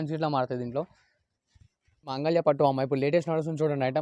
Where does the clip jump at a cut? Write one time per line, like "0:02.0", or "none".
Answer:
0:02.1